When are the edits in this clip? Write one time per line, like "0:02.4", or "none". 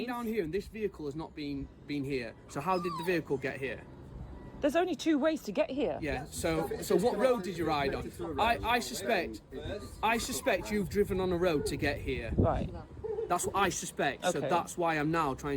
none